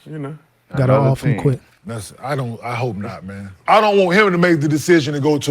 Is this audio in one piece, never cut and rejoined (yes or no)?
no